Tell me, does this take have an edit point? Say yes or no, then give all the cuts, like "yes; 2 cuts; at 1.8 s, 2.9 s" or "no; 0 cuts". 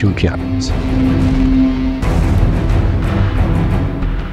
no; 0 cuts